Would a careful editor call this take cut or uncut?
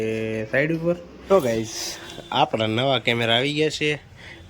cut